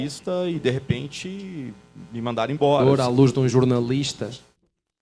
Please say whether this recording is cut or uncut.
cut